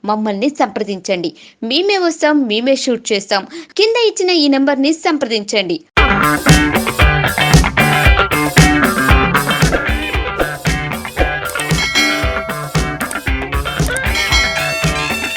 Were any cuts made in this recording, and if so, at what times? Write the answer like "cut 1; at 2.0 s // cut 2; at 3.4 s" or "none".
none